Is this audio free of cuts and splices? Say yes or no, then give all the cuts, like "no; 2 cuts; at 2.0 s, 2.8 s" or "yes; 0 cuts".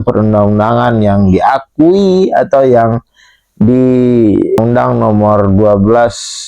no; 1 cut; at 4.6 s